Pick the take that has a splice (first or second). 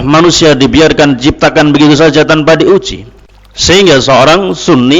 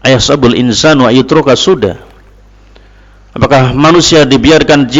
first